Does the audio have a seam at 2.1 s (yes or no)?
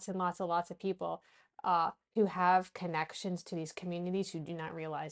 no